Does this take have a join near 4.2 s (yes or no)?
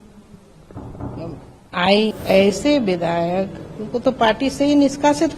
no